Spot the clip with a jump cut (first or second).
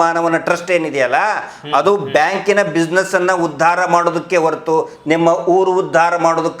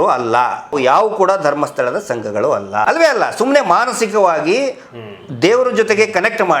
second